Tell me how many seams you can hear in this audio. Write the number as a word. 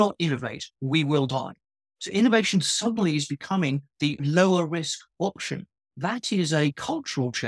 one